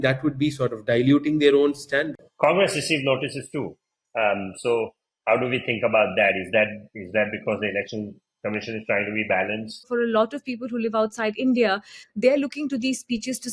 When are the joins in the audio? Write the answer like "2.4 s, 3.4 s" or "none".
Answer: 2.2 s, 9.9 s